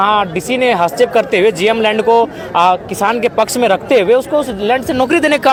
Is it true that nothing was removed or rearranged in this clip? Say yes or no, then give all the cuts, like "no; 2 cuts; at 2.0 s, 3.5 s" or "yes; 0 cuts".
yes; 0 cuts